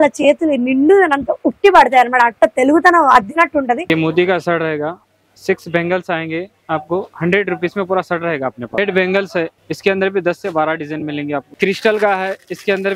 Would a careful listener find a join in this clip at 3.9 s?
yes; 4 cuts; at 3.9 s, 8.8 s, 9.5 s, 11.5 s

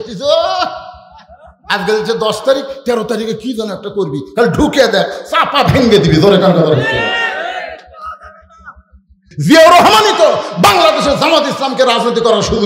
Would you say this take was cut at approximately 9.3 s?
yes; 1 cut; at 9.3 s

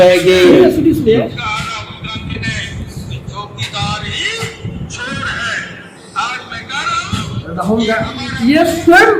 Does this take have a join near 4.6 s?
no; 0 cuts

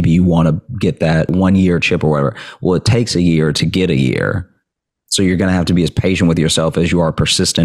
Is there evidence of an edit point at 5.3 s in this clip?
no; 1 cut; at 1.3 s

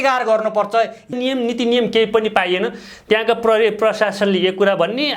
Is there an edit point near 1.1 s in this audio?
yes; 1 cut; at 1.1 s

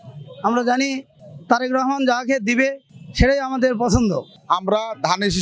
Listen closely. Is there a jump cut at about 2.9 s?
no; 1 cut; at 4.3 s

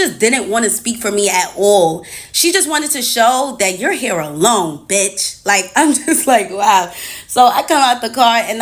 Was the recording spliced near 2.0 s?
no; 0 cuts

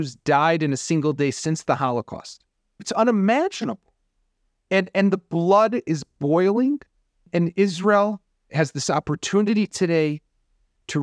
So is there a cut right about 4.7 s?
no; 3 cuts; at 2.9 s, 7.3 s, 8.5 s

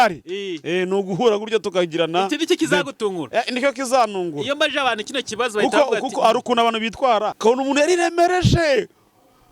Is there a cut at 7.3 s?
yes; 1 cut; at 7.3 s

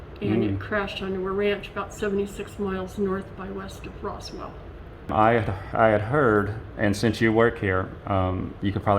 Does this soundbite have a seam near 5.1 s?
yes; 1 cut; at 5.1 s

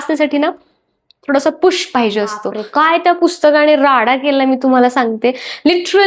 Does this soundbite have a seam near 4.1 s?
no; 1 cut; at 2.5 s

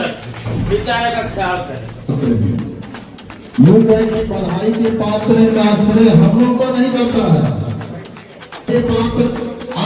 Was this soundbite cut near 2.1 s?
yes; 1 cut; at 2.1 s

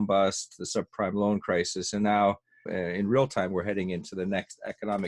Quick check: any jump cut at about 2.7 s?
yes; 1 cut; at 2.7 s

